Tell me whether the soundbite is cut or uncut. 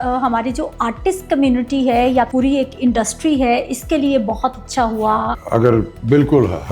cut